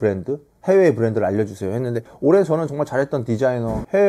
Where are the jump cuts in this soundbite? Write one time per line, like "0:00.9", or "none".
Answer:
0:02.0

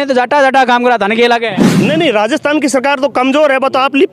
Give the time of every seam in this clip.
0:01.7

